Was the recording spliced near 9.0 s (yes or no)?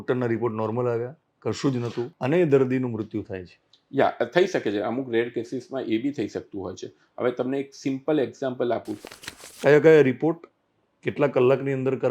yes